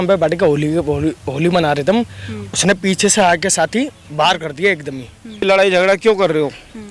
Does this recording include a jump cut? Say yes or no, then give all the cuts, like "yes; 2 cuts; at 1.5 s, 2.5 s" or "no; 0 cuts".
yes; 1 cut; at 5.5 s